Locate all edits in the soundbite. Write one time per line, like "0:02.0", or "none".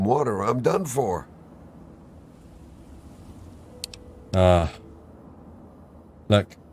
none